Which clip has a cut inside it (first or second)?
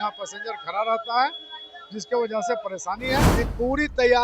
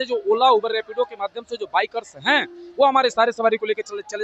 first